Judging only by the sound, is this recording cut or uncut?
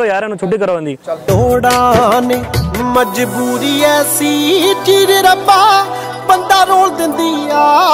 uncut